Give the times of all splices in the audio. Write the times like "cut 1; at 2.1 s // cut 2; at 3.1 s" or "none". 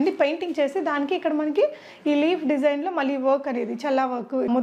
none